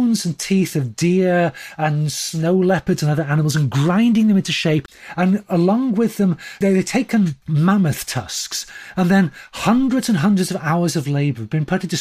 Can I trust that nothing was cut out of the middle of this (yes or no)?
no